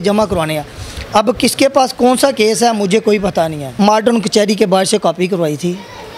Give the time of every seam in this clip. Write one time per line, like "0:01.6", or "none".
0:03.6